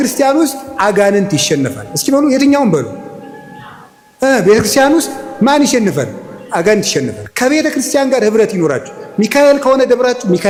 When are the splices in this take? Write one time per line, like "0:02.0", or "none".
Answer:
none